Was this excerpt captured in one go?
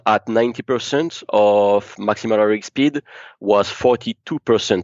yes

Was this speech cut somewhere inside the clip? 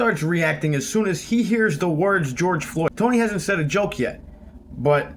yes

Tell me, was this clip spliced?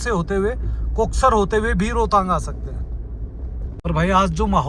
yes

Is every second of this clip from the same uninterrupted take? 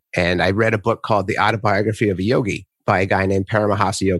no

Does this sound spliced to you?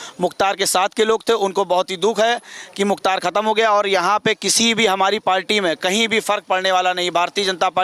no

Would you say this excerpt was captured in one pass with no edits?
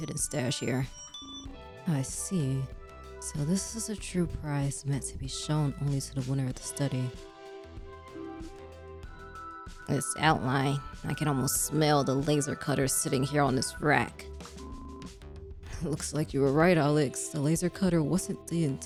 yes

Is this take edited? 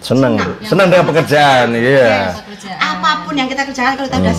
no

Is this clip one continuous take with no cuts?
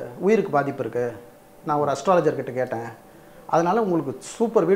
yes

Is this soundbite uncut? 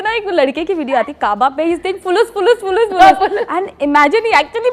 yes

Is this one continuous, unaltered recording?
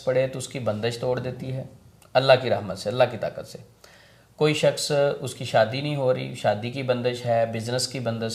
yes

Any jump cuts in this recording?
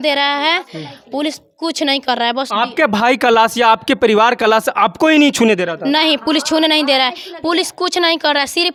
no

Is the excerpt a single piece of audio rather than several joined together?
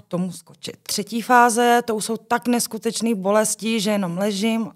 no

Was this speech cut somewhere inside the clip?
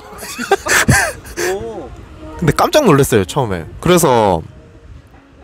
no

